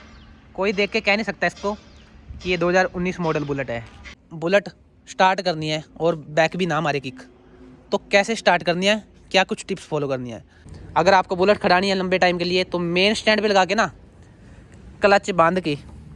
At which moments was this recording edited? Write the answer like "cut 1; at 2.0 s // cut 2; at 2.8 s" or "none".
cut 1; at 4.2 s // cut 2; at 10.7 s